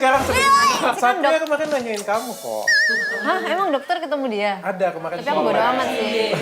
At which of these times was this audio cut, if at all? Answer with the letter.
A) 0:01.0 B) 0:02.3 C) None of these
A